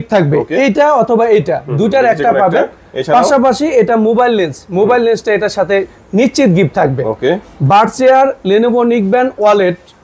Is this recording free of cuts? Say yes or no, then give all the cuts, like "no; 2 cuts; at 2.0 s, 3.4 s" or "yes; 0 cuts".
yes; 0 cuts